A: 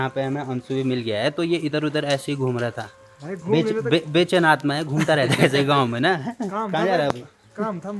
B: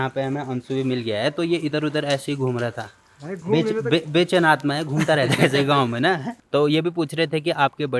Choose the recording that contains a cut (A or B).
B